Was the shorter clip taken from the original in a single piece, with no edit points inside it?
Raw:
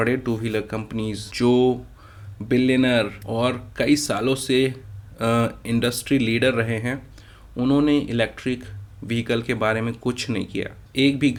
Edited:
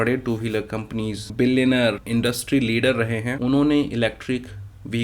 no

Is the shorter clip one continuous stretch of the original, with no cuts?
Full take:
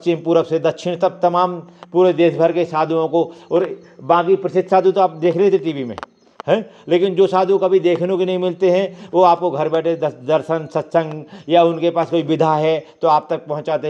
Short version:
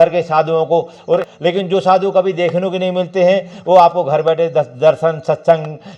no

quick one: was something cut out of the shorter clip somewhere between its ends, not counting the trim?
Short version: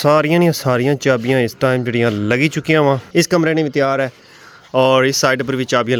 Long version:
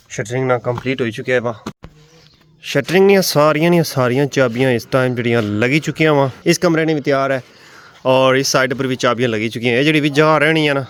no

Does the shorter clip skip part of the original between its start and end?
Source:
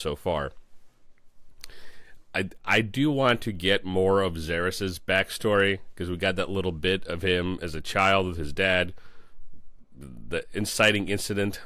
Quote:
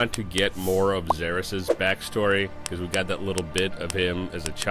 no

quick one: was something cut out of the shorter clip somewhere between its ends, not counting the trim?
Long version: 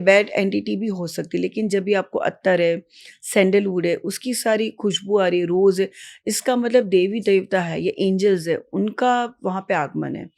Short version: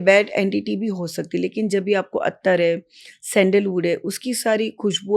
no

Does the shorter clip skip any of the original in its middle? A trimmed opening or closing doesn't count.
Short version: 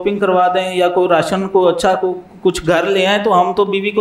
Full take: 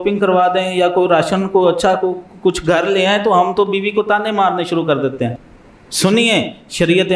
no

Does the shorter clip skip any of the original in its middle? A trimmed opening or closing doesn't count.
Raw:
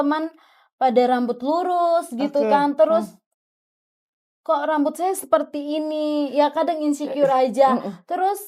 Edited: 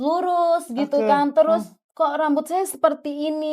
yes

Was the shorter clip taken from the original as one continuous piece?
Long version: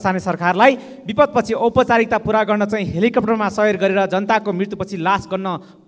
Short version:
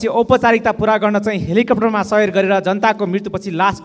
yes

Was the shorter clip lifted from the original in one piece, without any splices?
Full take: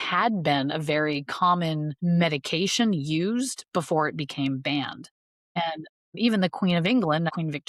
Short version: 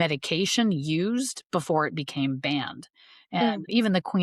no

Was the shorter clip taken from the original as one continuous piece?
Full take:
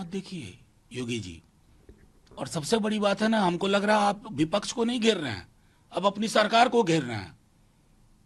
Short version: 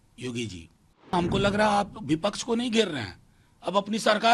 no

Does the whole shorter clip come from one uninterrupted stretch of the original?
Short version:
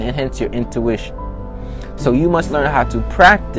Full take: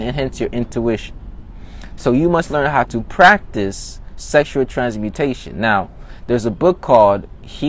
yes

